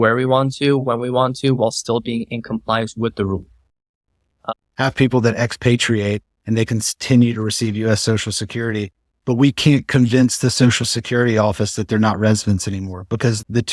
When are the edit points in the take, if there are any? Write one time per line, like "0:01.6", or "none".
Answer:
0:04.6